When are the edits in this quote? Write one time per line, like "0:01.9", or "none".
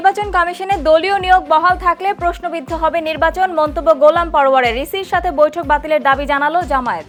none